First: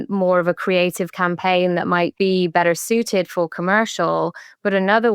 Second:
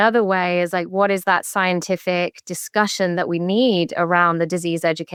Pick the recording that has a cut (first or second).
first